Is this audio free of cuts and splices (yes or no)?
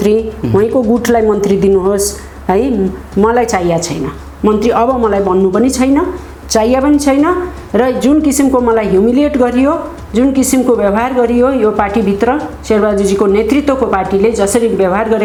yes